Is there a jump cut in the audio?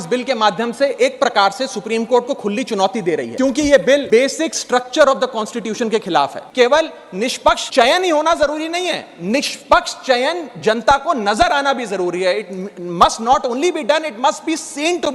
yes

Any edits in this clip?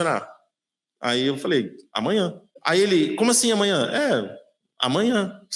yes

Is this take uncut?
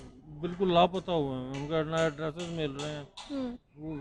yes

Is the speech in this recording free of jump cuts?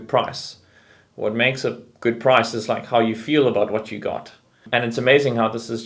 no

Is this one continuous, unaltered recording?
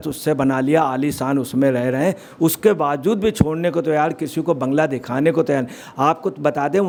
yes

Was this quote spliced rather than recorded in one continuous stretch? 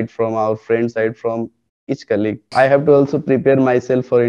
yes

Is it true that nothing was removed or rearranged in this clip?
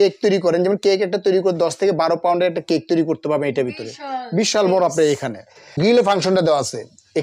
no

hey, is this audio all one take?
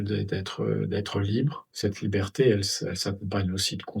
no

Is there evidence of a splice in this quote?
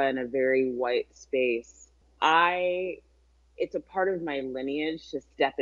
no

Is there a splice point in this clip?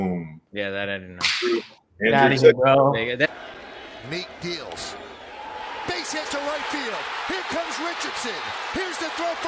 no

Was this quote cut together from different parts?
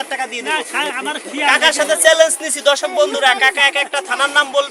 no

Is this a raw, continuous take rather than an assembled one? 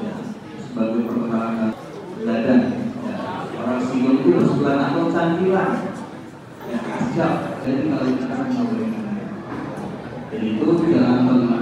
yes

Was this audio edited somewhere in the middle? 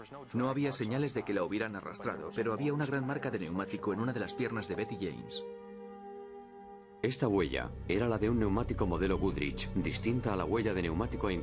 no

